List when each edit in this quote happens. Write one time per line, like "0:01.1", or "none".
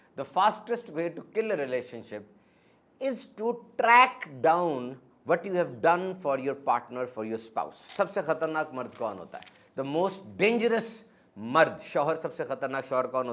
0:07.9